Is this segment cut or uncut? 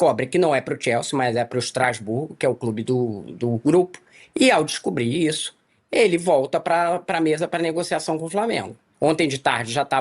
cut